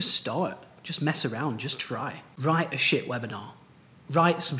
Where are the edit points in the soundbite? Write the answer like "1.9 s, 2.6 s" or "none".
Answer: 2.2 s